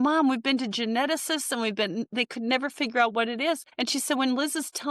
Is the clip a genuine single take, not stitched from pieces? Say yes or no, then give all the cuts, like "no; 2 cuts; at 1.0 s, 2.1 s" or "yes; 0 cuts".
no; 1 cut; at 3.7 s